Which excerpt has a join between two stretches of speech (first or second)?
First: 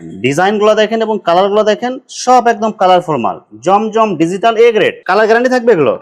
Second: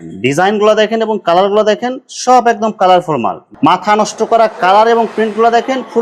second